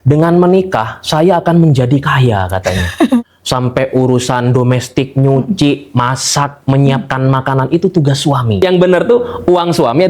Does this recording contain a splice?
yes; 2 cuts; at 3.4 s, 8.6 s

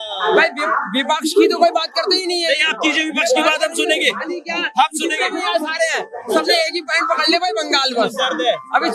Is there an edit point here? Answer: no; 0 cuts

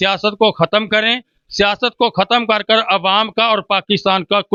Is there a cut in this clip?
no; 0 cuts

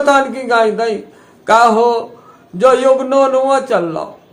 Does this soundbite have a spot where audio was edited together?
no; 0 cuts

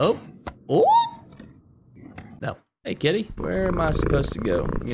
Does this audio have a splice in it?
yes; 1 cut; at 2.8 s

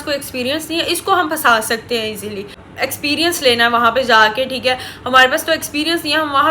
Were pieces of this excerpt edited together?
yes; 1 cut; at 2.7 s

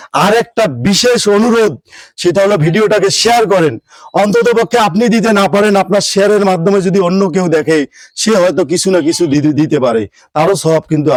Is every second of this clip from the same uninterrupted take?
yes; 0 cuts

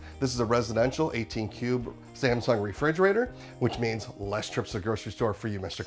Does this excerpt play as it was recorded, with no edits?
no; 1 cut; at 3.4 s

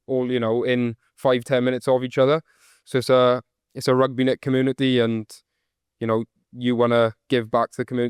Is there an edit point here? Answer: no; 0 cuts

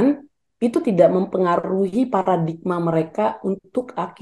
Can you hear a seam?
no; 0 cuts

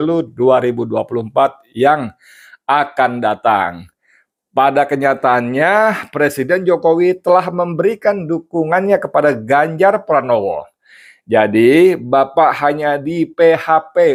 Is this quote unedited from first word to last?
yes; 0 cuts

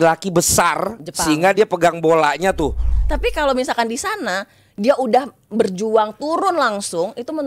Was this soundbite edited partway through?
yes; 1 cut; at 2.9 s

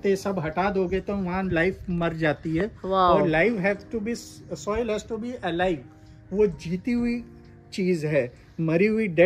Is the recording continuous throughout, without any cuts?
yes; 0 cuts

